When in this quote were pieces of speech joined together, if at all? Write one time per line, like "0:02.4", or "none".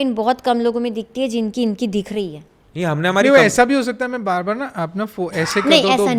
none